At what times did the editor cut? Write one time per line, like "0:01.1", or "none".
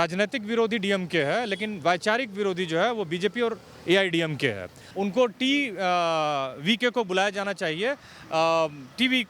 0:04.8